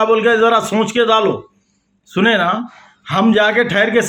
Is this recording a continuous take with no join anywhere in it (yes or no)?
yes